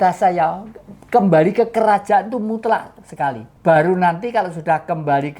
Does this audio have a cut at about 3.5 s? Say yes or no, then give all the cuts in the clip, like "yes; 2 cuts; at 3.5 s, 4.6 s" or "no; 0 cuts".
yes; 1 cut; at 3.5 s